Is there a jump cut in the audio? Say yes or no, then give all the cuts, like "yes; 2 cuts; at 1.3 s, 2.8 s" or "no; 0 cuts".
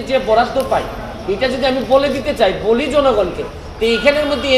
no; 0 cuts